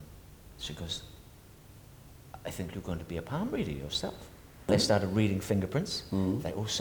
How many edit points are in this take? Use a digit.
1